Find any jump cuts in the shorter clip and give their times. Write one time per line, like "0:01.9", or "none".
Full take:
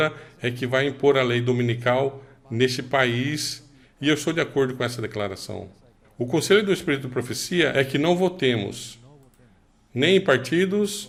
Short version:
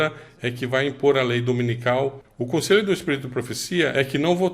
0:02.2